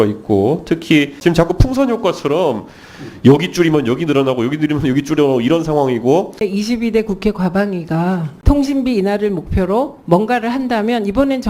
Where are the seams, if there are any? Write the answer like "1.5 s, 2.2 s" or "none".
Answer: 1.2 s, 6.4 s, 8.3 s

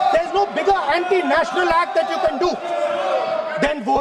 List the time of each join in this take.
none

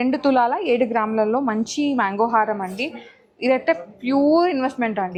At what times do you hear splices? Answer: none

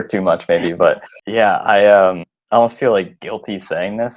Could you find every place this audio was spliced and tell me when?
1.1 s, 2.3 s

